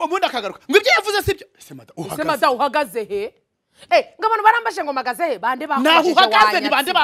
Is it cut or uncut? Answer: uncut